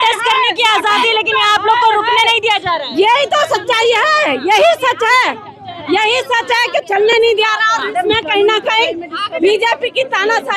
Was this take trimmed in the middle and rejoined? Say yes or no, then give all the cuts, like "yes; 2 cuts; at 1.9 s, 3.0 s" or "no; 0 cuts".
no; 0 cuts